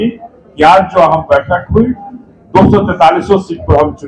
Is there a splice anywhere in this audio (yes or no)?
no